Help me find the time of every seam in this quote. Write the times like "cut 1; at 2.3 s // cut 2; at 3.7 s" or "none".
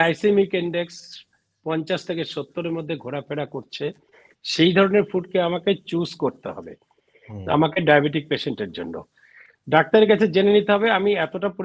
none